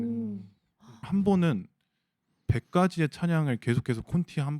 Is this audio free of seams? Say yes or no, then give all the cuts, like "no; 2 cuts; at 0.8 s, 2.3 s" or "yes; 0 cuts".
no; 1 cut; at 1.1 s